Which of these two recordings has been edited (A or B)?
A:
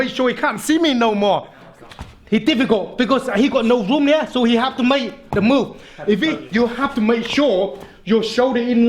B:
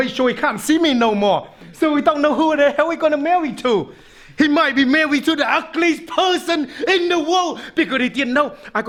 A